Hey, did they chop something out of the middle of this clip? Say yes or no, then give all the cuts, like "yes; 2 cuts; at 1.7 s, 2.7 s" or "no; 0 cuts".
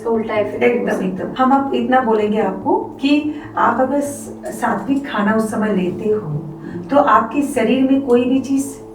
yes; 1 cut; at 1.2 s